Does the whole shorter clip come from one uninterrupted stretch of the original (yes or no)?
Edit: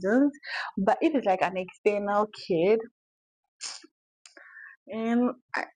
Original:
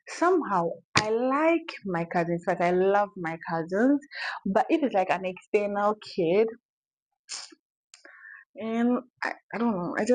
yes